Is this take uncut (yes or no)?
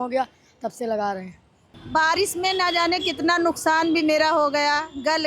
no